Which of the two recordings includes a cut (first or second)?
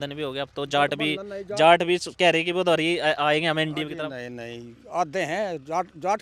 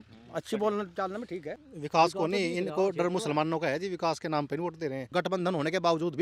second